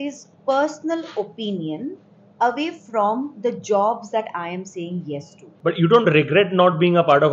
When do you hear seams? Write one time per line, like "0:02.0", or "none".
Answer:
0:05.4